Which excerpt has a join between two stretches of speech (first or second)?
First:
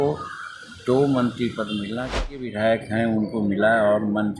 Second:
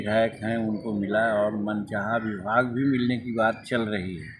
first